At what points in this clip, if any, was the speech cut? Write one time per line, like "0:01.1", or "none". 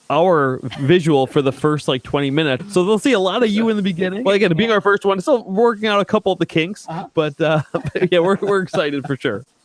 0:02.6
0:04.2